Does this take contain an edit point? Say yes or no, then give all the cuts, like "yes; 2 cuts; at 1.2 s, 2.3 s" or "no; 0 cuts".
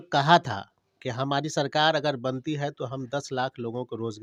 no; 0 cuts